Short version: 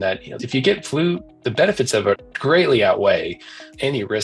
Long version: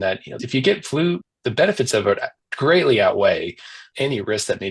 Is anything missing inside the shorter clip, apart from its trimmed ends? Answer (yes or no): yes